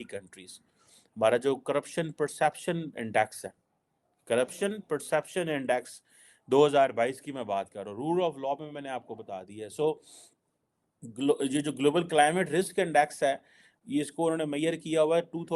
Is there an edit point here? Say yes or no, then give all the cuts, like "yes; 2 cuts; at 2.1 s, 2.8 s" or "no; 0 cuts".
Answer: no; 0 cuts